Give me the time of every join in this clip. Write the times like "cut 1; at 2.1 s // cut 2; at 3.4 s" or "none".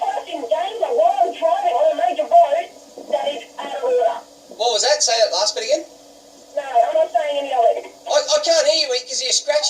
cut 1; at 7.9 s